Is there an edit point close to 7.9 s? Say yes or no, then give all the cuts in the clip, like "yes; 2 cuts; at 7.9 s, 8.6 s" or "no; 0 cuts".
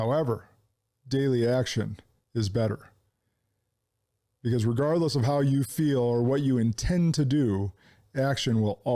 no; 0 cuts